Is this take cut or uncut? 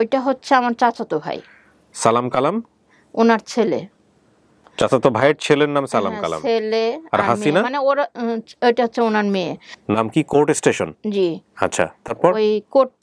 cut